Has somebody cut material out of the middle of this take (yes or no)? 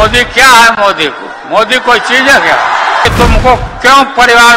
yes